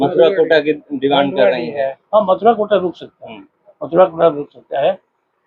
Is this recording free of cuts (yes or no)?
yes